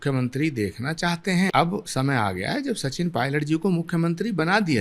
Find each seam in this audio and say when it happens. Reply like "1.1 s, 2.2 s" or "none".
1.5 s

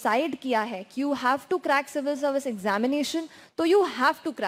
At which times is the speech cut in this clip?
none

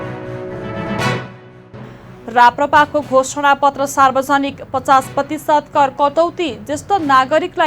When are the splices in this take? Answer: none

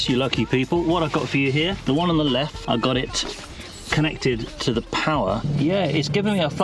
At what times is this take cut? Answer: 1.8 s, 2.6 s, 5.5 s

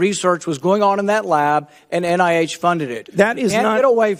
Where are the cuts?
none

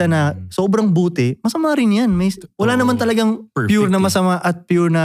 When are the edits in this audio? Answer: none

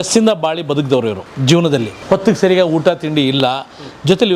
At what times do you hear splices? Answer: 1.3 s, 1.9 s

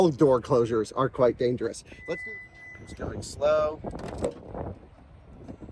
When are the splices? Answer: 2.2 s

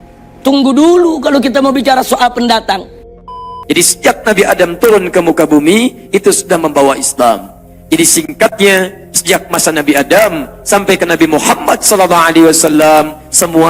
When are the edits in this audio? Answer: 3.5 s

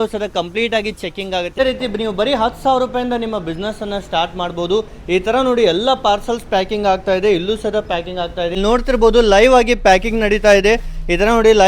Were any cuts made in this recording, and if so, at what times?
1.5 s, 8.5 s

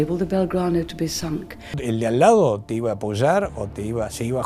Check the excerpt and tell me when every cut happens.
1.8 s

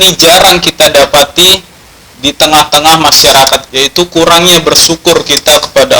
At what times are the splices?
3.7 s

